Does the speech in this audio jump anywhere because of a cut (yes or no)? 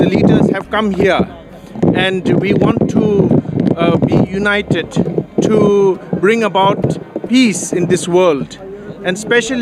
no